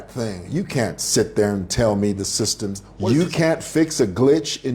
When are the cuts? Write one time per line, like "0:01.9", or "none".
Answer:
0:02.8

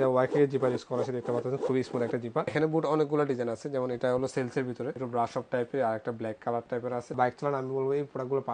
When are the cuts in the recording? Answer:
0:02.5
0:05.0
0:07.1

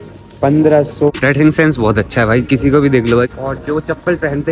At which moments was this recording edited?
0:01.1
0:03.3

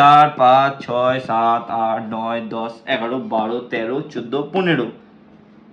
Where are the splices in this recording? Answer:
none

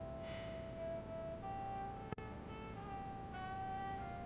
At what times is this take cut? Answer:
none

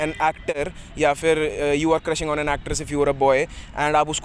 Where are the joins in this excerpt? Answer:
none

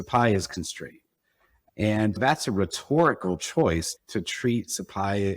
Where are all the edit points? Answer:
0:02.2
0:03.9

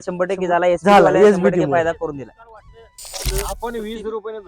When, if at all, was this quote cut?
0:03.2

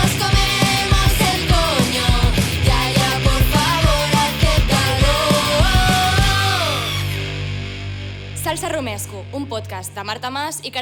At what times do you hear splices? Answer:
none

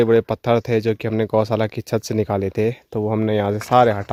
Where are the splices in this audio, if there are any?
none

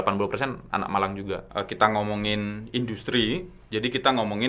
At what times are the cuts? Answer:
0:01.5

